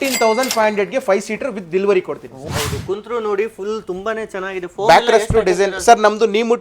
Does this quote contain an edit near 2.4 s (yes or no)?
yes